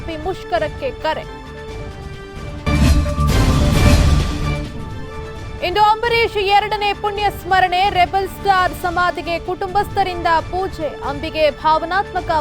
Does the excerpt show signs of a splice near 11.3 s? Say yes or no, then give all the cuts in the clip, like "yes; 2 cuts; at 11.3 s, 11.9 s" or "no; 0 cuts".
no; 0 cuts